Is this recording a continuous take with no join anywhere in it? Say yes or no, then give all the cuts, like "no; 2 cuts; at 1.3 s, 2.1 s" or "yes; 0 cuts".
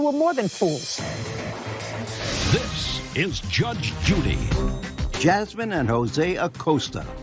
no; 1 cut; at 3.2 s